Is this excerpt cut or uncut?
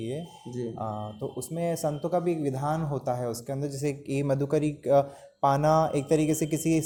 uncut